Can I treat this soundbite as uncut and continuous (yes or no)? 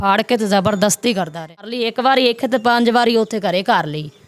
no